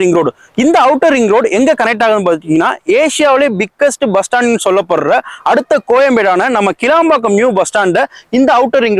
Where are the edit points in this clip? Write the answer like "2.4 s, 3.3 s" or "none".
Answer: none